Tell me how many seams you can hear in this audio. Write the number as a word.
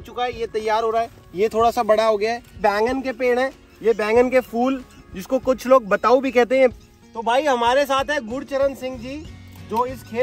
two